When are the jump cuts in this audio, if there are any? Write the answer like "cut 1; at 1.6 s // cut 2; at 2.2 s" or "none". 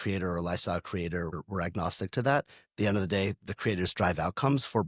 cut 1; at 1.3 s

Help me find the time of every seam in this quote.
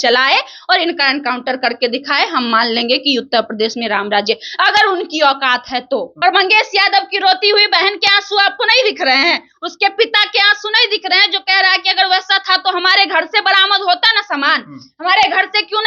cut 1; at 6.1 s

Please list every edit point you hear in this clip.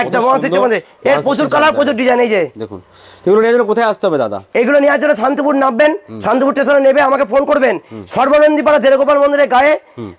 none

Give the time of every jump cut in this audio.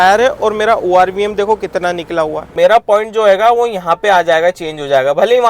cut 1; at 2.5 s

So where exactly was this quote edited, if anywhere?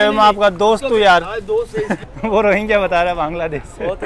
cut 1; at 2.1 s

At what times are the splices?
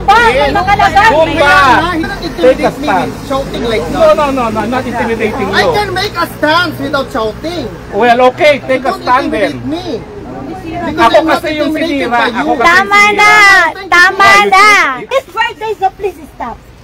cut 1; at 2.0 s // cut 2; at 15.1 s

